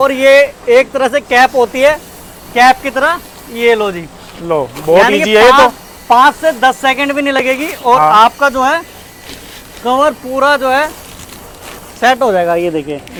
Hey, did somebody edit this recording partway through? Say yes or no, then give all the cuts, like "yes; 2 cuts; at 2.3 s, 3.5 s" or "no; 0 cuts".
no; 0 cuts